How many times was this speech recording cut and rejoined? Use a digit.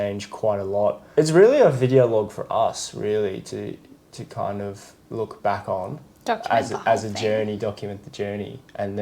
1